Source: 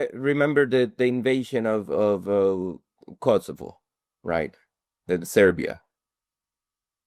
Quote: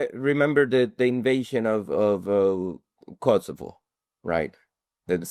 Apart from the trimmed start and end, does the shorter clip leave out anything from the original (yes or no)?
no